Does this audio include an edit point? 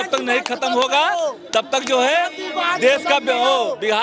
no; 0 cuts

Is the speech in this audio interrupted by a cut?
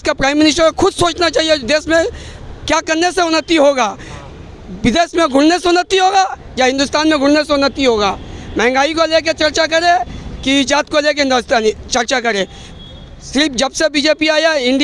no; 0 cuts

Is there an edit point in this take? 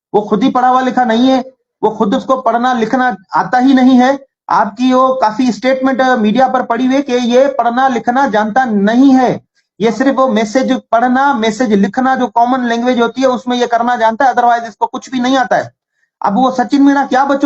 no; 0 cuts

